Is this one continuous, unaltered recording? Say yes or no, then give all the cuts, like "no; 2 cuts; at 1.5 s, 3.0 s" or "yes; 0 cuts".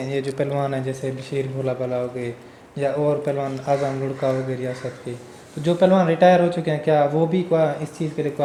yes; 0 cuts